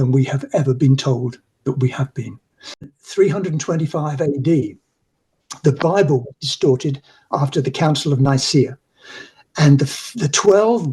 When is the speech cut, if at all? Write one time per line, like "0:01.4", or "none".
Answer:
0:03.0